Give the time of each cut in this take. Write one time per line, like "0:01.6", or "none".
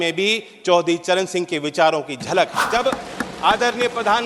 0:02.6